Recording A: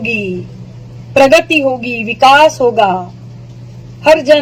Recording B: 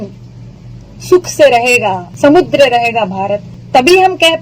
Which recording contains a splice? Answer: B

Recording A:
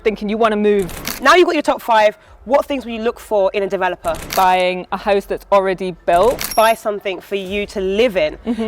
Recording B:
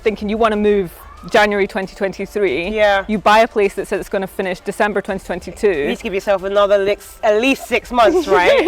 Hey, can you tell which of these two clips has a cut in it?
A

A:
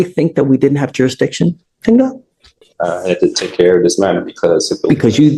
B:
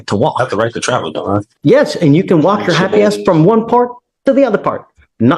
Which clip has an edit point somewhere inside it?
B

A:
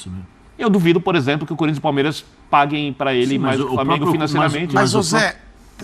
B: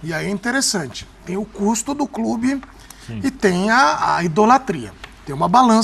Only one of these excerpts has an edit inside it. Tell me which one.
A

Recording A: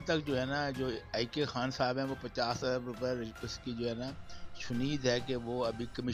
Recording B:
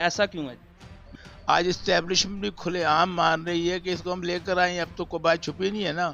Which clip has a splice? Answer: B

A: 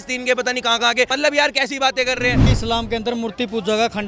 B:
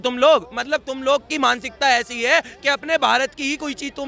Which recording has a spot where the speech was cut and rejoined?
A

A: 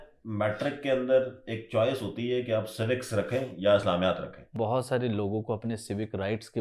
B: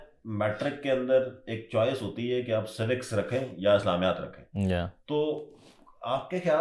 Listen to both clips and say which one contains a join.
A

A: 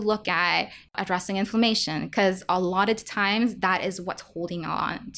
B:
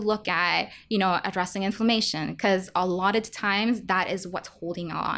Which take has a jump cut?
A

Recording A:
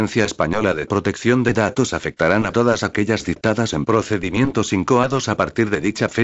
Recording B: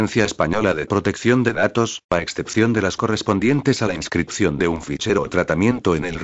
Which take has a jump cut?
B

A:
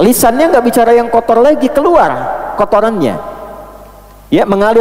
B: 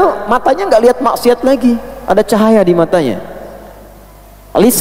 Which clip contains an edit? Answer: B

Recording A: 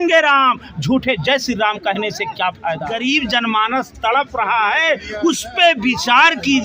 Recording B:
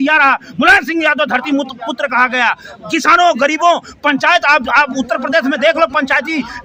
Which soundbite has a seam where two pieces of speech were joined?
A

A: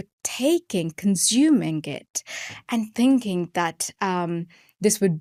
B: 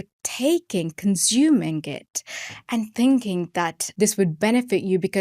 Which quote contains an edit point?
B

